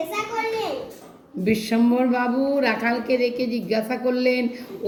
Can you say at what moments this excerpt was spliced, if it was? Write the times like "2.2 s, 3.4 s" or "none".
none